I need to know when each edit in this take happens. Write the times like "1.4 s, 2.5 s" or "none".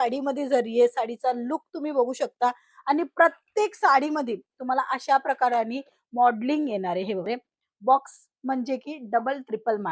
7.3 s